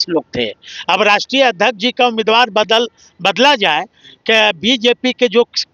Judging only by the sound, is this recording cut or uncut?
uncut